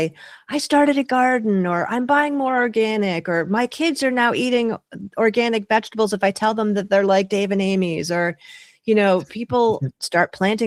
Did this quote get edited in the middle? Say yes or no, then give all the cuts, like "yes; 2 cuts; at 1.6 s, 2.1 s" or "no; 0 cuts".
no; 0 cuts